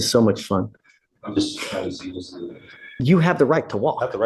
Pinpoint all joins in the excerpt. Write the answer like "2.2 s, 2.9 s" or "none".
2.9 s